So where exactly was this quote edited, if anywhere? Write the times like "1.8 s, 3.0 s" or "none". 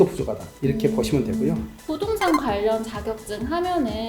1.7 s